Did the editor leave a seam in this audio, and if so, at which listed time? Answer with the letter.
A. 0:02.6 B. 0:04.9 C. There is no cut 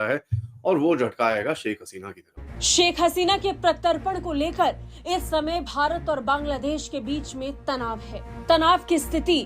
A